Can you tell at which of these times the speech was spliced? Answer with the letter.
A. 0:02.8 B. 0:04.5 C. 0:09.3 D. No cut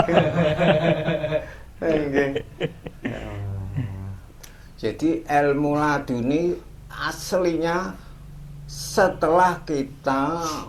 D